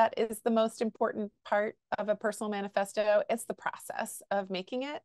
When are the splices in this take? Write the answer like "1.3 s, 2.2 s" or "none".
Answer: none

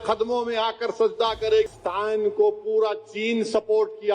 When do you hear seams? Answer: 1.7 s

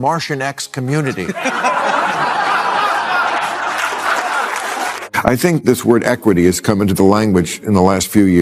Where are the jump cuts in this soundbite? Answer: 4.8 s

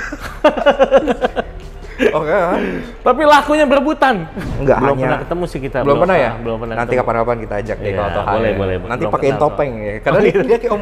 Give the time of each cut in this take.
4.4 s, 8.8 s

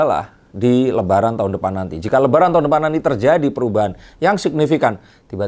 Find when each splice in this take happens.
none

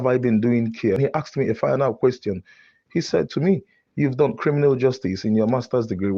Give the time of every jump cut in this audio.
1.0 s

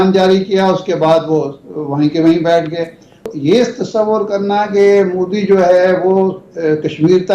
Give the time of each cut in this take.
3.3 s

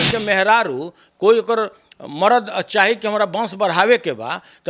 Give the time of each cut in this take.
none

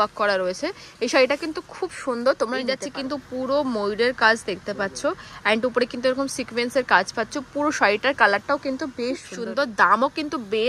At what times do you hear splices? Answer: 2.8 s, 9.3 s

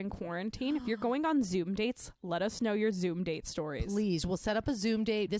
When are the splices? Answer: none

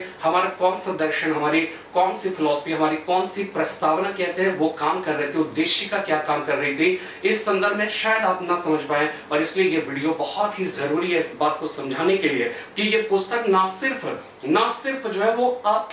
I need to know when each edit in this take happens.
none

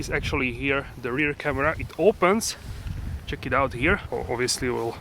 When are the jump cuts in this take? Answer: 4.0 s

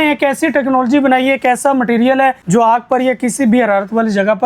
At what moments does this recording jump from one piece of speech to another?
2.4 s

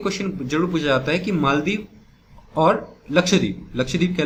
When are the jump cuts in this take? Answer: none

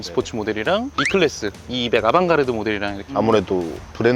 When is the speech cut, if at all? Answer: 3.0 s

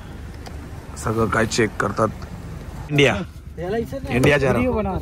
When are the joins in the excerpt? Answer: 2.9 s

